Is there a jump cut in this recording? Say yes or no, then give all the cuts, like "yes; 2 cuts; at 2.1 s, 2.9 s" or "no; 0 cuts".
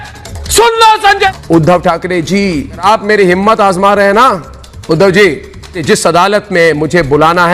yes; 3 cuts; at 1.3 s, 2.8 s, 5.8 s